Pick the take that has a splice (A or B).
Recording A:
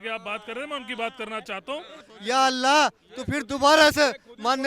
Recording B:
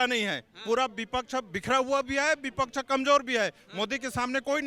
A